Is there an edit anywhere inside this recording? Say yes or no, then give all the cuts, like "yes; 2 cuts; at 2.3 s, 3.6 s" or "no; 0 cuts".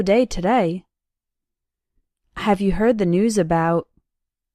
yes; 1 cut; at 2.8 s